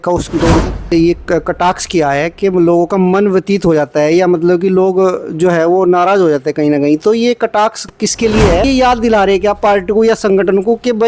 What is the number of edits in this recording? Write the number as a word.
two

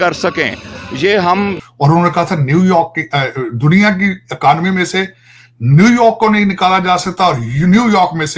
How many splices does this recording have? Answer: one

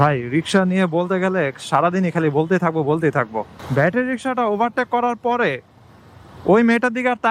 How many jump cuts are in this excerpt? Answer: one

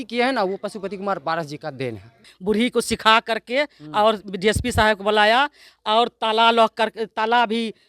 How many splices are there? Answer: one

